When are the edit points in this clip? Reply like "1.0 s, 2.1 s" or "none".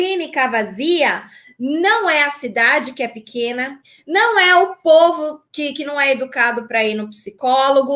none